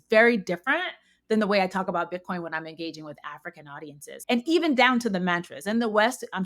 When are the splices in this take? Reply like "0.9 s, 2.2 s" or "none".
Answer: 4.2 s

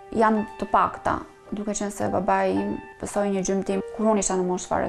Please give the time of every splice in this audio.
2.9 s, 3.8 s

